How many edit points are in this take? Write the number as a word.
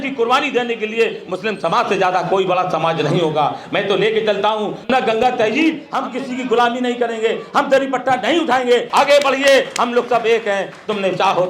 three